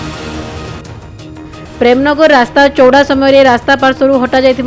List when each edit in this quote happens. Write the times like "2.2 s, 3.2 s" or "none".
1.3 s

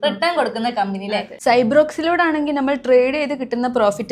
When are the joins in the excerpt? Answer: 1.3 s

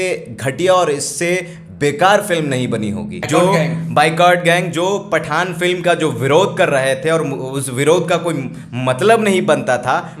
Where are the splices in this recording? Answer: 3.1 s

